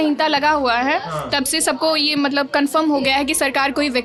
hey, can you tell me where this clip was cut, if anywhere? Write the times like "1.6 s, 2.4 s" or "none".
none